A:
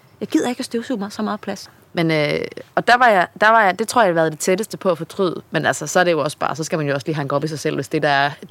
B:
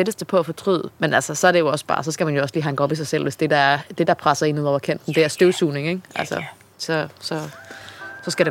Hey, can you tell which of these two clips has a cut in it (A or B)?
A